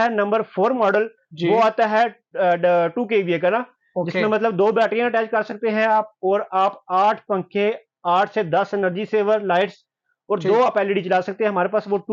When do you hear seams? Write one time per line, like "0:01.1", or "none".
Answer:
none